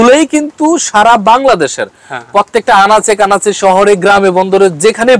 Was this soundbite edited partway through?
no; 0 cuts

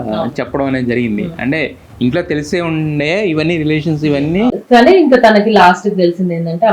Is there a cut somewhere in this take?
yes; 1 cut; at 4.6 s

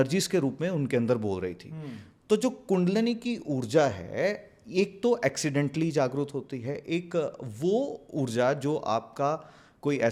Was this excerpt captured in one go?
yes; 0 cuts

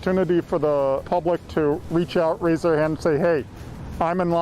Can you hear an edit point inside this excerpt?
yes; 1 cut; at 1.0 s

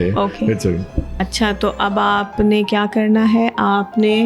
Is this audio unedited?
no; 1 cut; at 1.2 s

